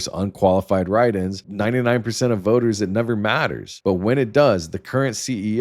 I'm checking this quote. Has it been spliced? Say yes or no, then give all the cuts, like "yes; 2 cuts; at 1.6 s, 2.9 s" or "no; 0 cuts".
yes; 2 cuts; at 1.4 s, 3.6 s